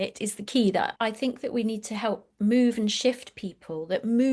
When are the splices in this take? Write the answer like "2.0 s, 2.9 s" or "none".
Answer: 0.9 s